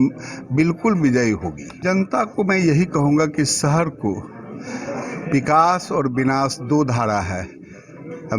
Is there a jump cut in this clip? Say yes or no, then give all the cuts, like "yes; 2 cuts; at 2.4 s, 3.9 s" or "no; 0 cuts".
yes; 1 cut; at 1.7 s